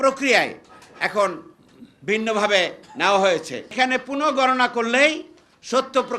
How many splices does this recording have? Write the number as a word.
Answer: one